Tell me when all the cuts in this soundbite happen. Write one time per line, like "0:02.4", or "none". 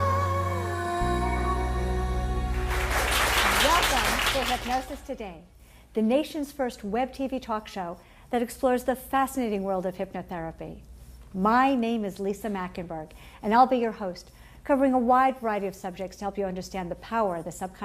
0:09.9

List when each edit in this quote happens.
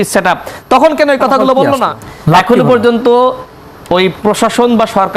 0:02.0

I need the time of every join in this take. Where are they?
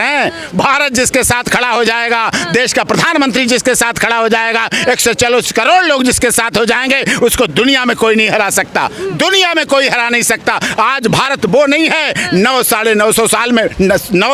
none

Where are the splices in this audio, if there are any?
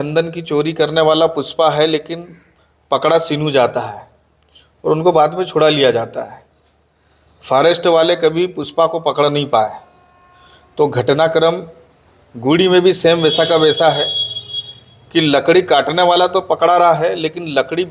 none

